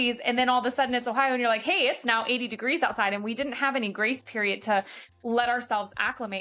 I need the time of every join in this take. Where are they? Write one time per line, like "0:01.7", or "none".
none